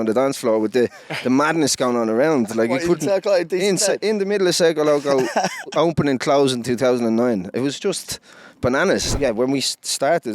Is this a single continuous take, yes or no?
no